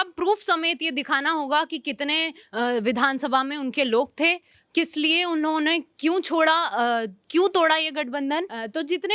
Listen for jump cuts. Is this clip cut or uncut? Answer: uncut